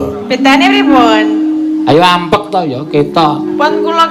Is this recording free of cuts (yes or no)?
yes